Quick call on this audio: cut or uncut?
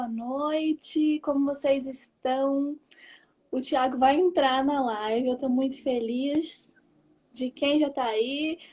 uncut